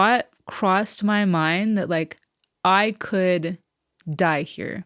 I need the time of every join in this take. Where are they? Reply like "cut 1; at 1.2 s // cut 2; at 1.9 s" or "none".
none